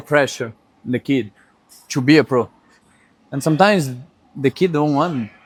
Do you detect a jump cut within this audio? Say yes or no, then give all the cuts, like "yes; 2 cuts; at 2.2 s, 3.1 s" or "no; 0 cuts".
no; 0 cuts